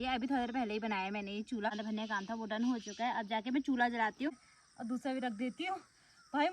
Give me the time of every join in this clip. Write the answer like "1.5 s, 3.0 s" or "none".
1.7 s, 4.3 s